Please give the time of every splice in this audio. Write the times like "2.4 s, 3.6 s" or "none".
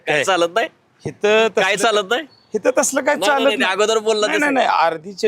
none